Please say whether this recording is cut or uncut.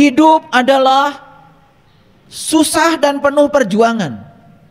uncut